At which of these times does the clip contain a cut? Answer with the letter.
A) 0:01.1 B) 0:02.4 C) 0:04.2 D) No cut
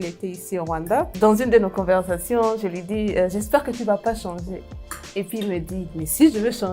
A